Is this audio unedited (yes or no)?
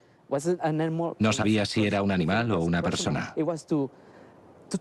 no